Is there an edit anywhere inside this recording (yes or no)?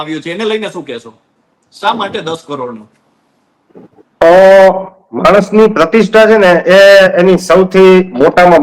no